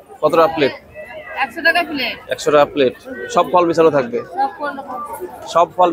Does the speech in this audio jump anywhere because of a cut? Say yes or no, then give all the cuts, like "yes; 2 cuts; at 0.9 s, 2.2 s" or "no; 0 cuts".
no; 0 cuts